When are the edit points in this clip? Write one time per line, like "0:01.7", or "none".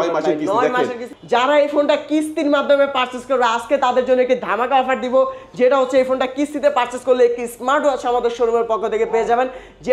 0:01.1